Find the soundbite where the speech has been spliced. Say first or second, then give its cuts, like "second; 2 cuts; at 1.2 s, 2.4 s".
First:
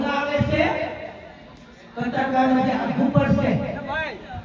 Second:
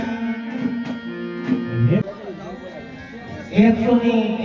second; 1 cut; at 2.0 s